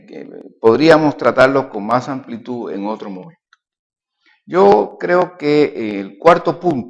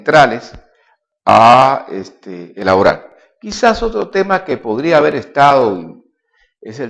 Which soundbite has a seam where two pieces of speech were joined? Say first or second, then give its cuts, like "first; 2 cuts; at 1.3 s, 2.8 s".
first; 1 cut; at 2.5 s